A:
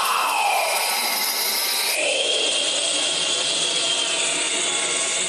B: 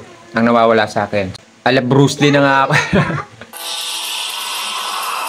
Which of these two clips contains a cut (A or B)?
B